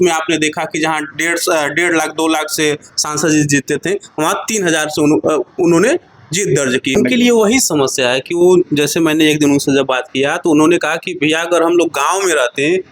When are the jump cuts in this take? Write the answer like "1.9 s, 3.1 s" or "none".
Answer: 6.9 s